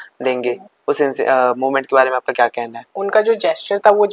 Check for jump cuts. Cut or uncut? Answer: cut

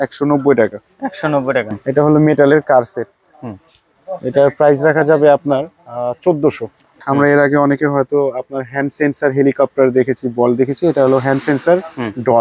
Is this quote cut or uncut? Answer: cut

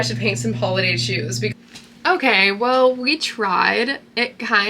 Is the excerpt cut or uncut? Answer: cut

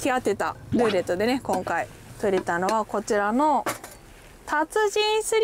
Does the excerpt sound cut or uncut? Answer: uncut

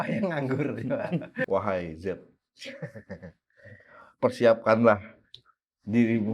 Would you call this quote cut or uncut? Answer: cut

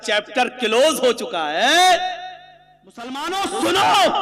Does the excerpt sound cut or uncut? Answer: cut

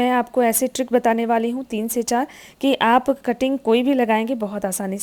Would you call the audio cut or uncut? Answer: uncut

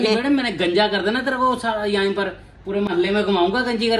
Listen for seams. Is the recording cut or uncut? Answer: uncut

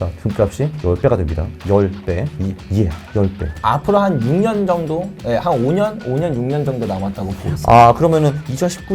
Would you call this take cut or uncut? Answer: cut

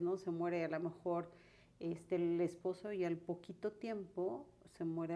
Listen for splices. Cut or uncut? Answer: uncut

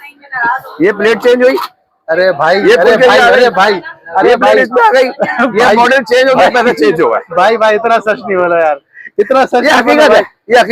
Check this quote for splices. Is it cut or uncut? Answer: uncut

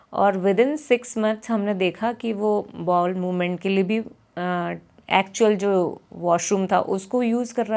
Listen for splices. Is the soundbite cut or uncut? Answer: uncut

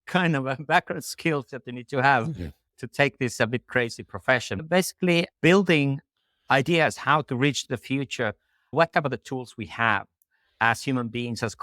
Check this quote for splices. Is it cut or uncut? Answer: cut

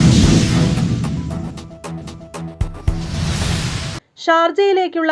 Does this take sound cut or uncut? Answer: uncut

